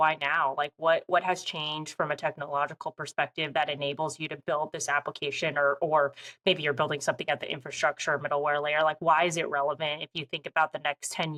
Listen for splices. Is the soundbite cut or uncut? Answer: uncut